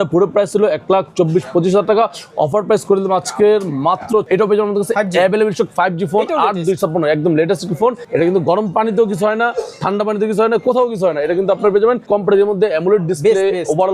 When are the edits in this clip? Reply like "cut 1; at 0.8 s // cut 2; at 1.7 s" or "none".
cut 1; at 4.2 s // cut 2; at 8.0 s // cut 3; at 12.1 s